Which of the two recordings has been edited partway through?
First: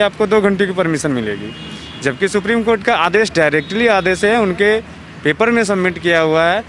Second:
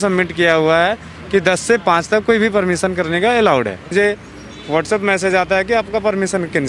second; 1 cut; at 3.9 s

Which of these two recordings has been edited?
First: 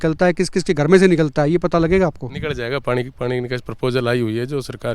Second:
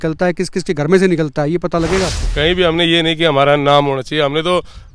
second; 1 cut; at 2.2 s

